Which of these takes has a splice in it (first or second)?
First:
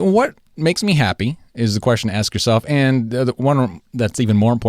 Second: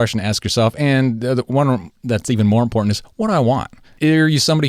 second